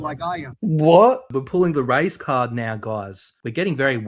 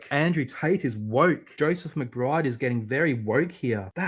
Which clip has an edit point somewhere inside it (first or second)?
first